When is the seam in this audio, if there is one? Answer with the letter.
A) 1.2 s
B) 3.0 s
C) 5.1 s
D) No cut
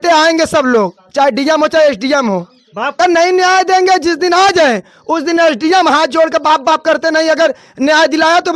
B